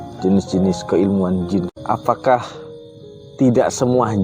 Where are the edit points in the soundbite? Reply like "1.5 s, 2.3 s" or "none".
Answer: 1.7 s